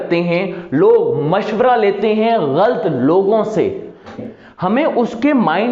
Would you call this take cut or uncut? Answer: cut